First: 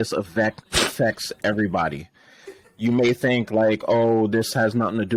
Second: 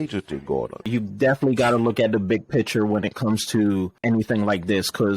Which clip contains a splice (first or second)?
second